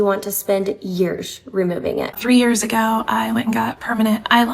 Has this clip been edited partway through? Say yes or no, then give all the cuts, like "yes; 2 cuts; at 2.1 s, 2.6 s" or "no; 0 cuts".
yes; 1 cut; at 2.1 s